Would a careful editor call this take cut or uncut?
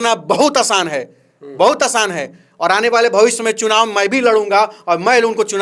uncut